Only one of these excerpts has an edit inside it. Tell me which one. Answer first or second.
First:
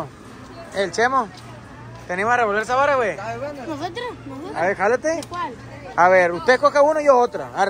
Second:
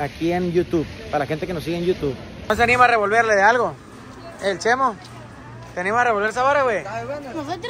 second